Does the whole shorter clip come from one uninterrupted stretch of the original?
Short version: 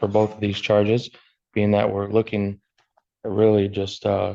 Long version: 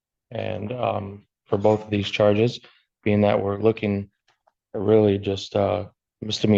yes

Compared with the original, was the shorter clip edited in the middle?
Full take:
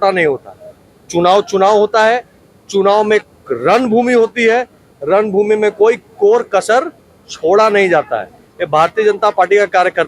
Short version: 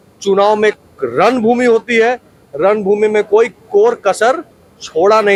no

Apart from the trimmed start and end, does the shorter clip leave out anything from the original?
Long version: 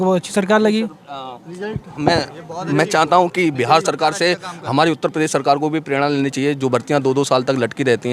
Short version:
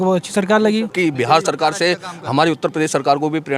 yes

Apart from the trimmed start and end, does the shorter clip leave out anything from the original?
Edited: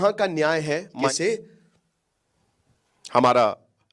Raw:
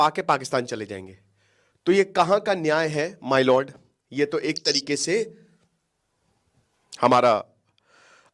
yes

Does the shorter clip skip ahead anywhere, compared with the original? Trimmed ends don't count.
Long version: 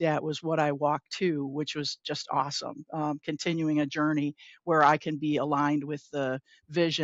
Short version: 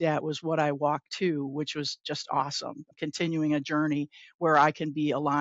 yes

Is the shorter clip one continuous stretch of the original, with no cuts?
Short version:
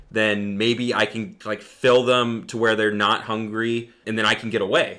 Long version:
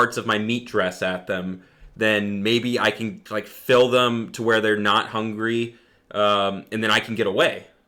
no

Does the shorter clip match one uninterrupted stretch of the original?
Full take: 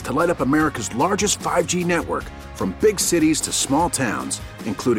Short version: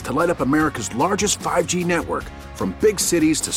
yes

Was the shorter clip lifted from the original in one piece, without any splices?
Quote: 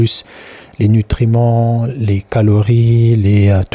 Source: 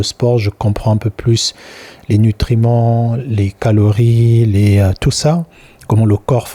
yes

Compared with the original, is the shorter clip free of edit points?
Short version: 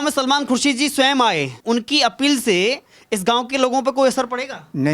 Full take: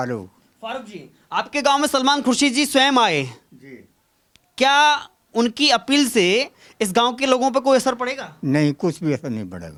no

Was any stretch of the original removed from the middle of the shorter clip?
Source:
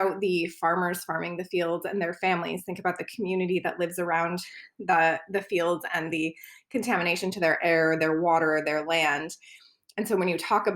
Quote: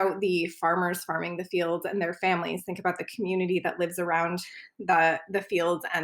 no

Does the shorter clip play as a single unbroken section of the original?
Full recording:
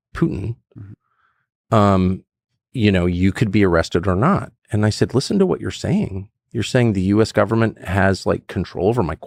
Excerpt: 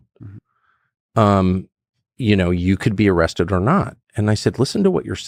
yes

